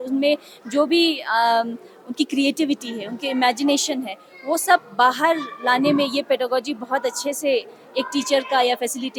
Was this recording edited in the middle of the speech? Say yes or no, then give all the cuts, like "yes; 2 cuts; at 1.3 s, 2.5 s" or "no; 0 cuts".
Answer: no; 0 cuts